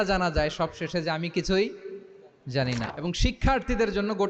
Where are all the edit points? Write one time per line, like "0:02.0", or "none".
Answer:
0:02.8